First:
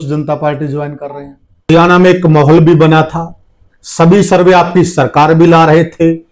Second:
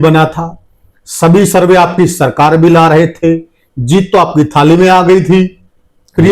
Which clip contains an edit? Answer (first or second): first